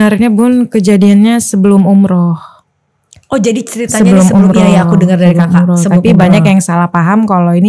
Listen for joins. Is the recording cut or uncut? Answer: uncut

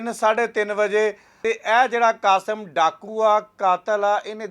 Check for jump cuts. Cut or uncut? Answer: cut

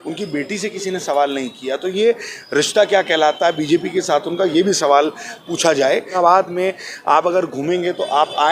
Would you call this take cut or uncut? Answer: cut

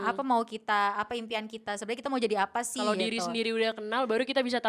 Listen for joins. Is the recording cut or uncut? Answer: uncut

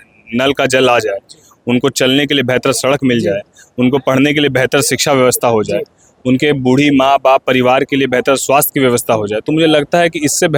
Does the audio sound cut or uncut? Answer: uncut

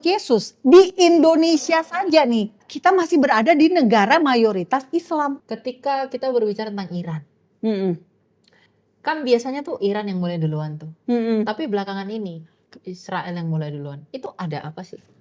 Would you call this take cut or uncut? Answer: cut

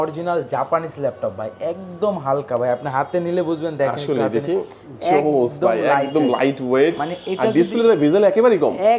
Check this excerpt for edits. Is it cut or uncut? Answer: uncut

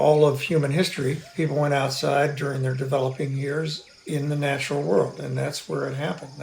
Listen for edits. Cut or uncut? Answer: uncut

